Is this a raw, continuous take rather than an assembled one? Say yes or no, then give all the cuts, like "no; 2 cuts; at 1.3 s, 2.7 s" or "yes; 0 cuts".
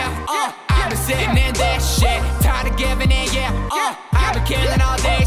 yes; 0 cuts